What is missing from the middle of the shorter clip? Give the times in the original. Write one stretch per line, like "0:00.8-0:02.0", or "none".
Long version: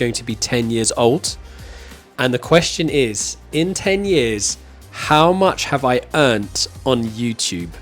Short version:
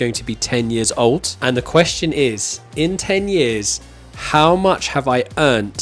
0:01.3-0:02.1